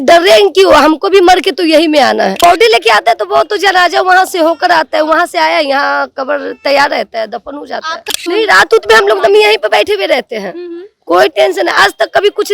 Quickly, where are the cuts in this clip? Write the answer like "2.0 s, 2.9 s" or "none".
2.4 s, 8.1 s

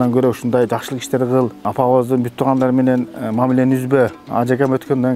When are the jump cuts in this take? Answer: 1.6 s, 4.2 s

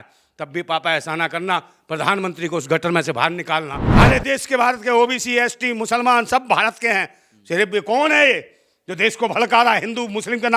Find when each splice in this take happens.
3.8 s

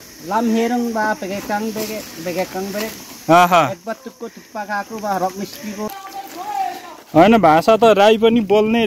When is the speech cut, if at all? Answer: 5.9 s

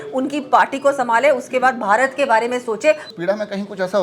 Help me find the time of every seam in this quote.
3.1 s

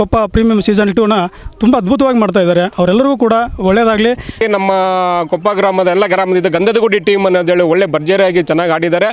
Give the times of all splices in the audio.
4.4 s

